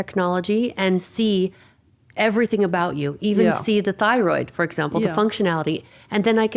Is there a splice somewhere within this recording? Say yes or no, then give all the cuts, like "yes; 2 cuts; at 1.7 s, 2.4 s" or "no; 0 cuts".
no; 0 cuts